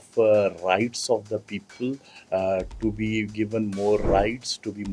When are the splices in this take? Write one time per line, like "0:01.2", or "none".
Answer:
none